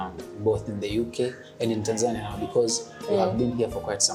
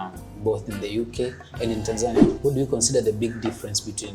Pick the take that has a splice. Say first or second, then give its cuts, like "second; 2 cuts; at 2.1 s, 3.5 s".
second; 1 cut; at 2.2 s